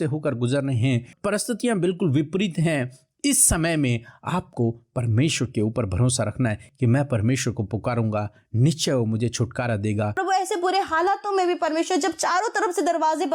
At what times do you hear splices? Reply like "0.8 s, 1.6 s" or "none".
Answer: 1.1 s, 6.6 s, 10.2 s

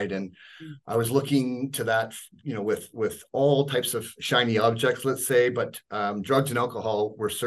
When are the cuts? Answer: none

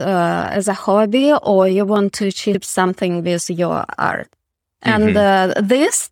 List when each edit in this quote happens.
2.7 s

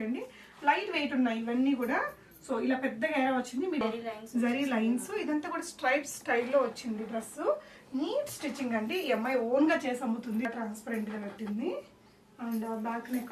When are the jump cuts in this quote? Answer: 3.8 s, 10.4 s

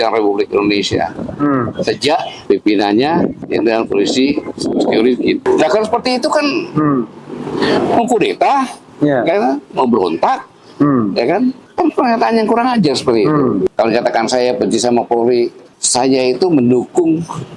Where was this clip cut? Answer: 2.3 s, 3.4 s, 5.4 s, 13.7 s

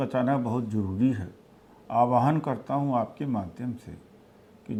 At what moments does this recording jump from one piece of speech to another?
none

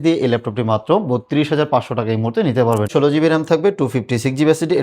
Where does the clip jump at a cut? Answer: 2.9 s

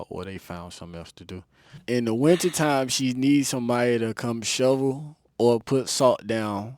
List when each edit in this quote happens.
1.8 s

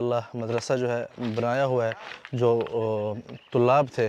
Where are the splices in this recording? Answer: none

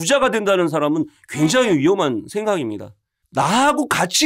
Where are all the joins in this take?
3.2 s

